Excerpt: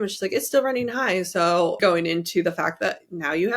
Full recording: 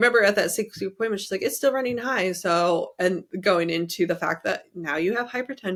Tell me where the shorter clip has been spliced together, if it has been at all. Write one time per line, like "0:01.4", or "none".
0:01.8